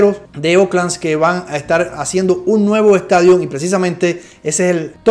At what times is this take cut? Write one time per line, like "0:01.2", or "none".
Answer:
none